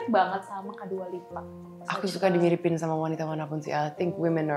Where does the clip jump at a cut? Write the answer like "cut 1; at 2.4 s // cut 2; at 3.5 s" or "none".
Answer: cut 1; at 1.8 s